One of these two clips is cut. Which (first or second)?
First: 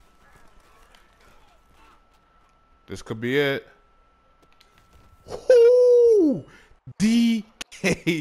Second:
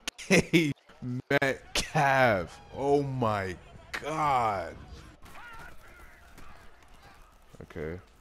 second